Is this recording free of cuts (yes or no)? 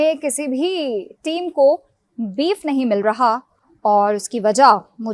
yes